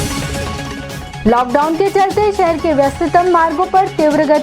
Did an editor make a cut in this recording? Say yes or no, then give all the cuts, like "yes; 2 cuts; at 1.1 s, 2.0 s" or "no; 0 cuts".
yes; 1 cut; at 1.1 s